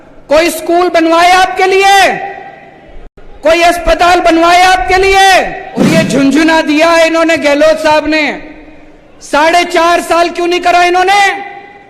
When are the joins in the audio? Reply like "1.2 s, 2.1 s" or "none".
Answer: 5.9 s